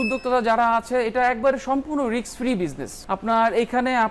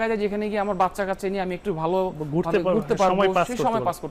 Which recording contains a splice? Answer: first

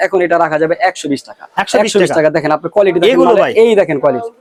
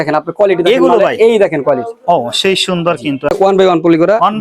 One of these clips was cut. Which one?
second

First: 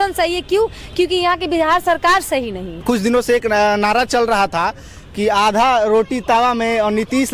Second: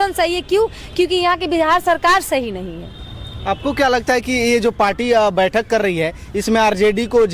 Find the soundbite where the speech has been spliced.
first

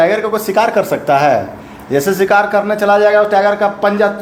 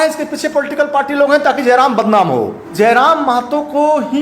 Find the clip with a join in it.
second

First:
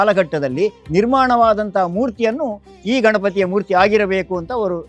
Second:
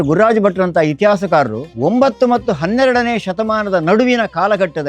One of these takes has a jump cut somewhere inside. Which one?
second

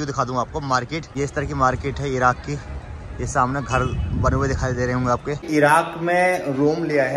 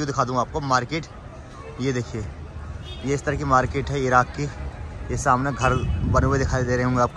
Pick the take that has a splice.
first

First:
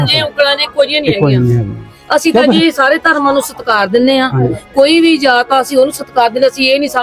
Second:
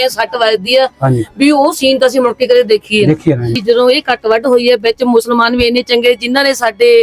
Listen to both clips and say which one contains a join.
second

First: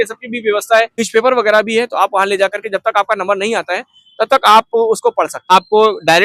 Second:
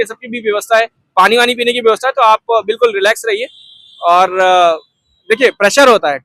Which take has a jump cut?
first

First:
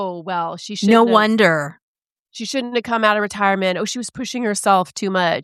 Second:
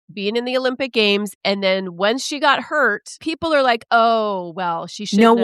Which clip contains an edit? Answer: second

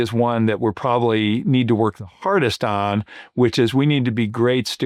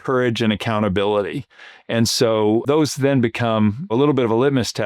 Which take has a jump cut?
second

